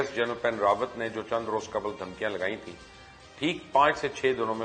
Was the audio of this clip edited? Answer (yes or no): no